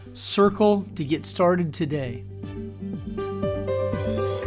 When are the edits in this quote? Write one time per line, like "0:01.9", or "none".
0:02.2

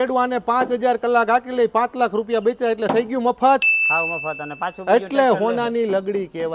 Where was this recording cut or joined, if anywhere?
none

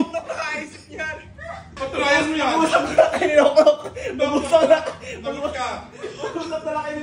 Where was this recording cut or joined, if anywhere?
0:01.7

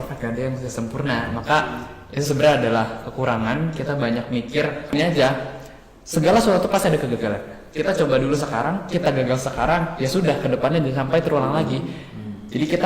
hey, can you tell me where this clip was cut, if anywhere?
0:04.9

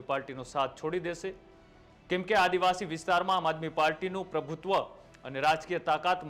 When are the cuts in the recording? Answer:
none

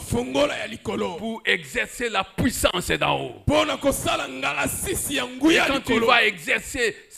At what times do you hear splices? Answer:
none

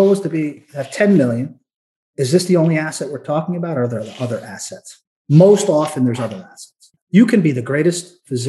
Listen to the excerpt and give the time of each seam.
0:05.1
0:06.9

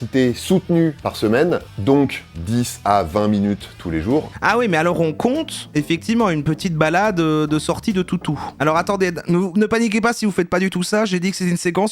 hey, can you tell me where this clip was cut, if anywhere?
0:04.3

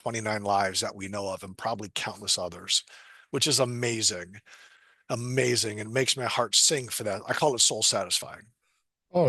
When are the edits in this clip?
none

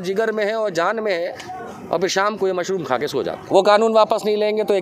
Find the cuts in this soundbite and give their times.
0:03.4

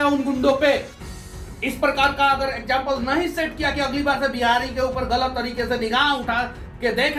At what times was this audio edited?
none

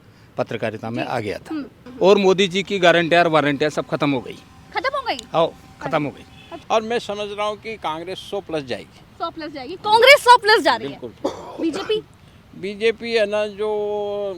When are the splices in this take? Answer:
0:01.8
0:06.5

